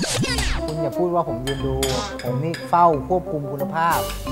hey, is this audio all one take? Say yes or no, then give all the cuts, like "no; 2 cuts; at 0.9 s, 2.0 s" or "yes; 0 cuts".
yes; 0 cuts